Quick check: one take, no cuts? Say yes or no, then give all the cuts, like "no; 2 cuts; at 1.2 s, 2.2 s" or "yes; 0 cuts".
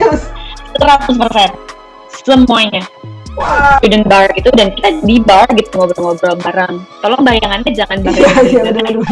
no; 1 cut; at 3.8 s